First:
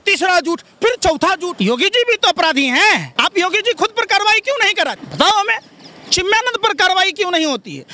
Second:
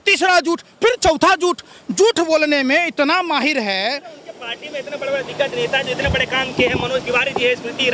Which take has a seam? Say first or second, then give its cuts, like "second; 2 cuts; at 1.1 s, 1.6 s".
first; 3 cuts; at 1.5 s, 3.1 s, 5.0 s